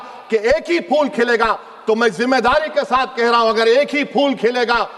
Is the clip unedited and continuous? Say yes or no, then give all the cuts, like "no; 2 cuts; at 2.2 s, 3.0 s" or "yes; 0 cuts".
yes; 0 cuts